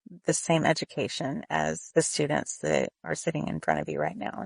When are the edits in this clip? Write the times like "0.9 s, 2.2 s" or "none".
1.8 s, 3.0 s

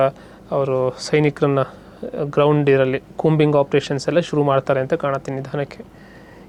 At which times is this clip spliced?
none

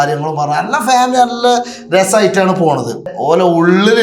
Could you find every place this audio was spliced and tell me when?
3.1 s

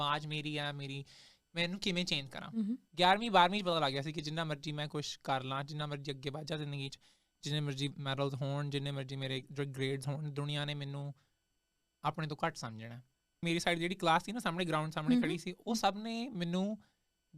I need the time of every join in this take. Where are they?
2.9 s, 13.4 s

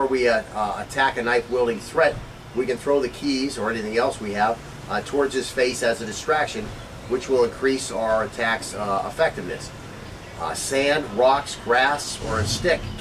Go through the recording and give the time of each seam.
none

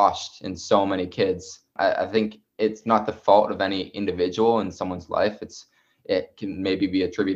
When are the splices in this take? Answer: 1.7 s

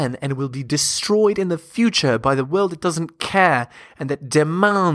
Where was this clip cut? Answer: none

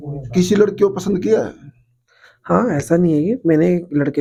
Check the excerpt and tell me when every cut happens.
none

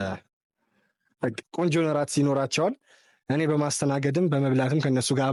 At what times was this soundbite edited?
none

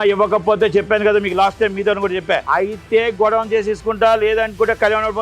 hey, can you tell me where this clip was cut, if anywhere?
2.4 s

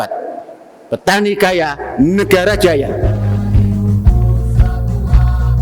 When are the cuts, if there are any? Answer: 3.2 s

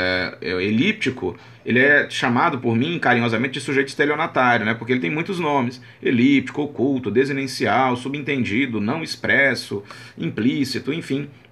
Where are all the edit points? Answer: 3.9 s

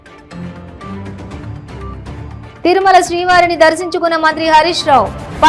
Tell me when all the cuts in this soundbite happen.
2.6 s

